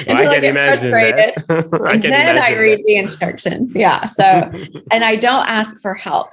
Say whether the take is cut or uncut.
uncut